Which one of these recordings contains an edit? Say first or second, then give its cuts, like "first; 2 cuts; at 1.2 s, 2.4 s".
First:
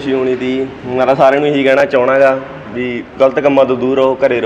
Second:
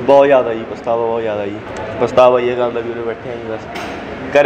second; 1 cut; at 1.6 s